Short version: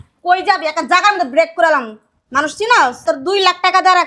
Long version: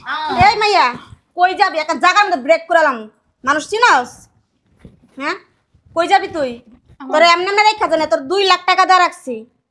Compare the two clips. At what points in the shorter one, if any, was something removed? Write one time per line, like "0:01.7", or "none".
0:03.0